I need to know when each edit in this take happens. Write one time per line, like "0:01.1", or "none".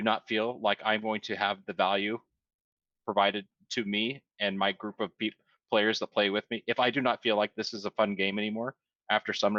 none